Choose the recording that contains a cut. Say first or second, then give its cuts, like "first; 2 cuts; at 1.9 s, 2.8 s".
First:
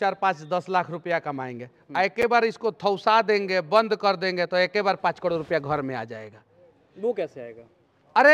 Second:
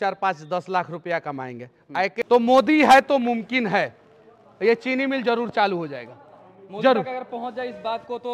second; 1 cut; at 2.2 s